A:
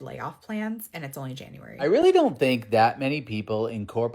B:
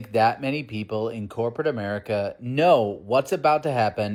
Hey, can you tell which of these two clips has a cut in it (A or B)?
A